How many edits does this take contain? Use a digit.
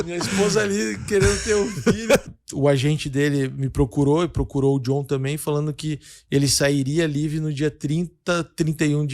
1